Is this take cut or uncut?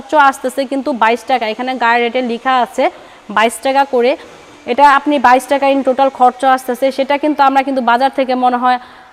uncut